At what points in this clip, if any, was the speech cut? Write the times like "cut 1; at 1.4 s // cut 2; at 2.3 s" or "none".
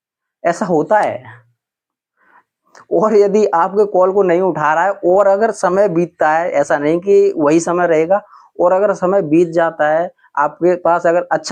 none